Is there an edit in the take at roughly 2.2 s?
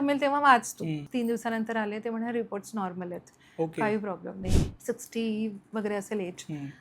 no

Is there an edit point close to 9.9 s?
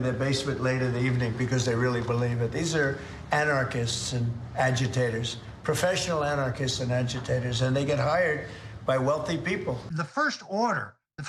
yes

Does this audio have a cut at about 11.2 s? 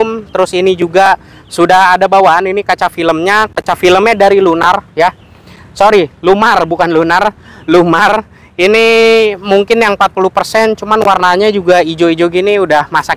no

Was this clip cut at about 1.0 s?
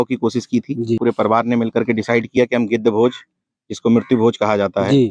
yes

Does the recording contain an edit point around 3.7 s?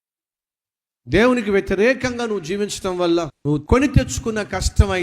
yes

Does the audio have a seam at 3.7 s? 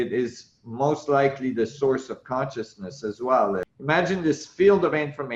yes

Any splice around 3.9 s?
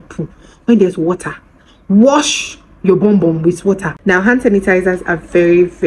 yes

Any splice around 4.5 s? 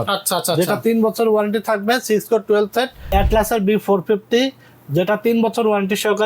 no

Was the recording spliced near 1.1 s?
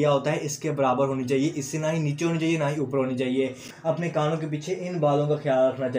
no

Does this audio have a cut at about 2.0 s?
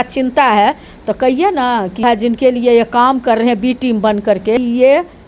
yes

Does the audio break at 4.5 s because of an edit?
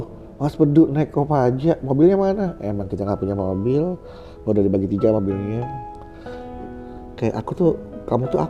no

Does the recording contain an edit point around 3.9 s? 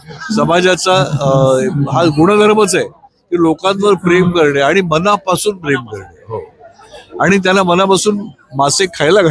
no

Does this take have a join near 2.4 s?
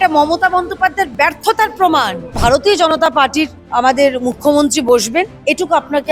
yes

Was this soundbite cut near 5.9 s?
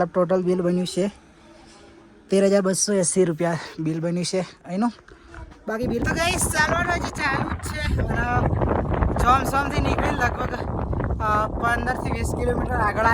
yes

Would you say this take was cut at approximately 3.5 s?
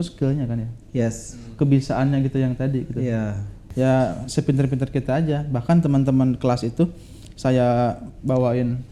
yes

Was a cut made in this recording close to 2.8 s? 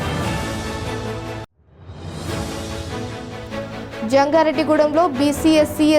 no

